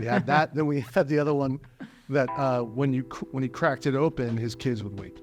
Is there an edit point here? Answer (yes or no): no